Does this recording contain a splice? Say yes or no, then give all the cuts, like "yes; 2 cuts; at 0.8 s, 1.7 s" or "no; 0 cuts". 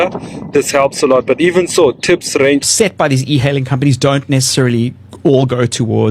yes; 1 cut; at 2.7 s